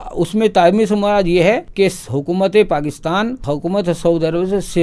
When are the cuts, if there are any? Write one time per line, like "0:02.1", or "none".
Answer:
0:01.7
0:03.4